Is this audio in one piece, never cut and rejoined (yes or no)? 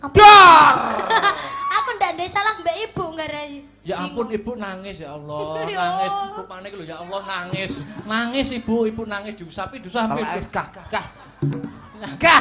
yes